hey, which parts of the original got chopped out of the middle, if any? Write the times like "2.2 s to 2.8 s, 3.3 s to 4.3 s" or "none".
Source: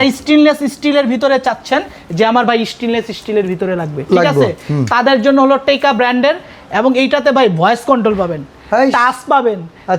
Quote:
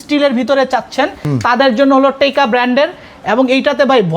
1.9 s to 4.7 s